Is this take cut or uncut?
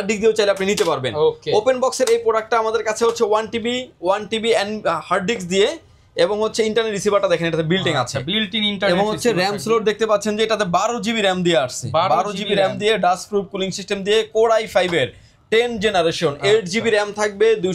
uncut